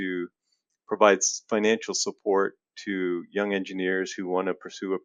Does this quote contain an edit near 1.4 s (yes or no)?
no